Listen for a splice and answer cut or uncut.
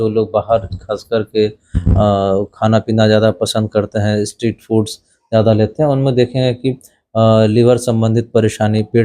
uncut